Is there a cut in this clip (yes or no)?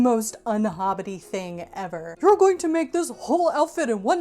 yes